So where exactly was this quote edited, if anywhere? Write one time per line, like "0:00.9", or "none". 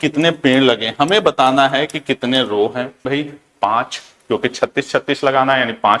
0:03.1